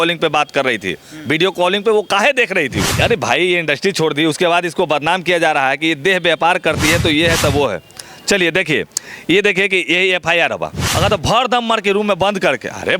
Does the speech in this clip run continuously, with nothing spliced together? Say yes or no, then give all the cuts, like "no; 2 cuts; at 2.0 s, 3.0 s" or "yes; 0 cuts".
no; 2 cuts; at 2.9 s, 10.8 s